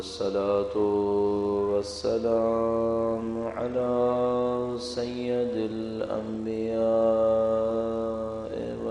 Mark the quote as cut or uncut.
uncut